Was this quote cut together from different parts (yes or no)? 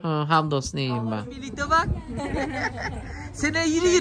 yes